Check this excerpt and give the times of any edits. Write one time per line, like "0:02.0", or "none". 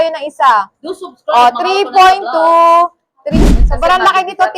0:03.2